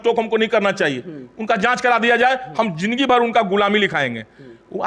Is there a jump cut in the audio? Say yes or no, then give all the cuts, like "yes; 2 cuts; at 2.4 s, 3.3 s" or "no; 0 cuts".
no; 0 cuts